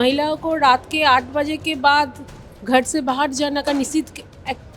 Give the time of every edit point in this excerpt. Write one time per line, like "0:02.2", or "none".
none